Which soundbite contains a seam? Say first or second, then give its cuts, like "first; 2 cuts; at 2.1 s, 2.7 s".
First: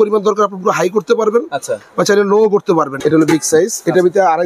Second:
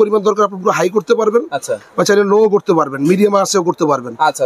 first; 1 cut; at 2.9 s